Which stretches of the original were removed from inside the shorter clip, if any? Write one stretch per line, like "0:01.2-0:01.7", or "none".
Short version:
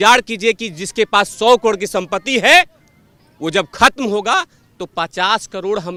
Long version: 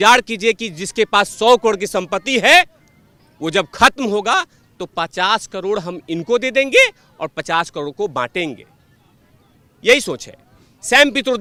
none